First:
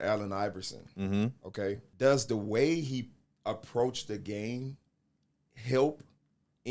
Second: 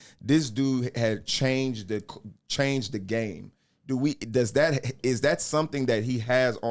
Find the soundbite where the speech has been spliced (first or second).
first